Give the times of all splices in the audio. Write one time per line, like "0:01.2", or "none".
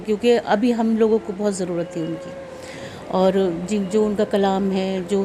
none